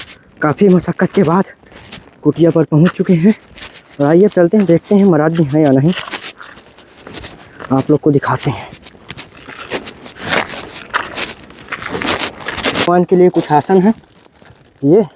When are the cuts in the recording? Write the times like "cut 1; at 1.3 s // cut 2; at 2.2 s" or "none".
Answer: cut 1; at 12.9 s